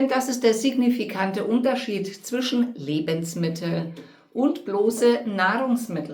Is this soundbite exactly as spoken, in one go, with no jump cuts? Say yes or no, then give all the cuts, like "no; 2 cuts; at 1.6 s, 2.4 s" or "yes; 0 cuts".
yes; 0 cuts